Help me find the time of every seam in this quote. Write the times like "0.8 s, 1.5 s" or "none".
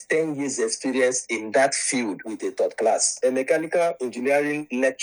3.2 s